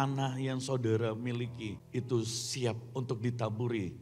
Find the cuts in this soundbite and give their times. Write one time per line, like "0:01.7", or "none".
0:01.8